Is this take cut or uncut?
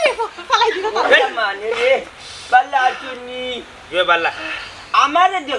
uncut